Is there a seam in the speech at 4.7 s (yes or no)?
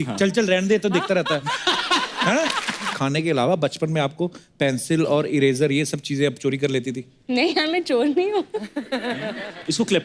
no